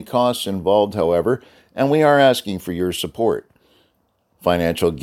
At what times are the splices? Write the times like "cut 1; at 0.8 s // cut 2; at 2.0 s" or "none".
none